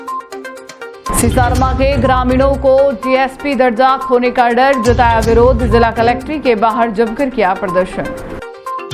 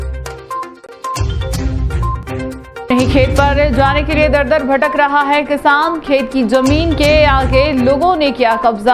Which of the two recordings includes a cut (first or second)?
first